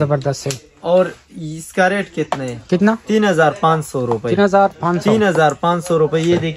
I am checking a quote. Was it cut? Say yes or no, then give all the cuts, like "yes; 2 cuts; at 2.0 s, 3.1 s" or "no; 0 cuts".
no; 0 cuts